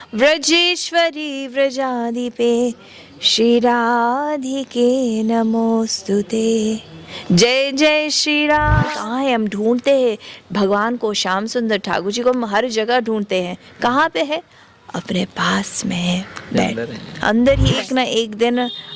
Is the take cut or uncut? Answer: cut